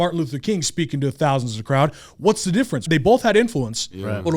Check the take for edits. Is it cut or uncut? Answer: cut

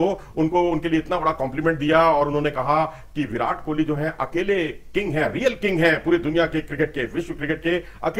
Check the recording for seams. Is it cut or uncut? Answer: uncut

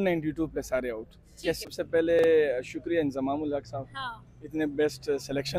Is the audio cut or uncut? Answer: cut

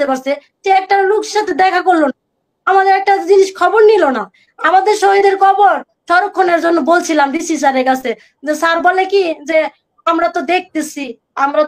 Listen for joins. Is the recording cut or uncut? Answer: uncut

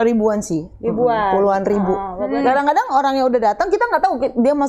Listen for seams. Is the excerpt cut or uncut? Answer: cut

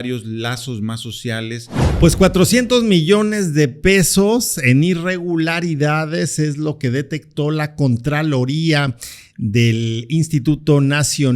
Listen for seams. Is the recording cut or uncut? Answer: cut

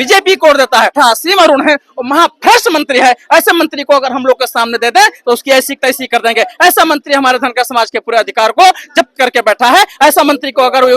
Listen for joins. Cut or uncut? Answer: cut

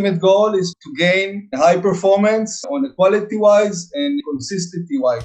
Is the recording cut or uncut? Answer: cut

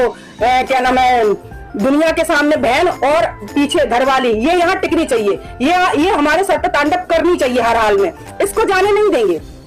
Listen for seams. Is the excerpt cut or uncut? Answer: uncut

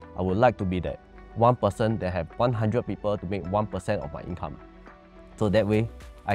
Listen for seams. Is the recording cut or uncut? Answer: uncut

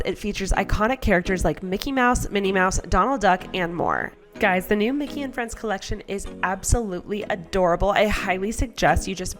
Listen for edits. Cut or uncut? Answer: cut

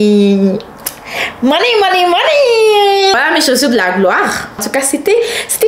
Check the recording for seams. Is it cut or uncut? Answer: cut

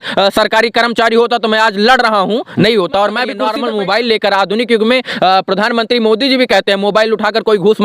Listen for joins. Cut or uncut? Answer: cut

